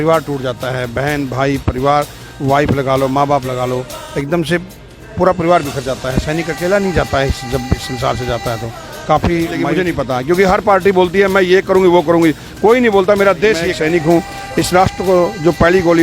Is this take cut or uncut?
cut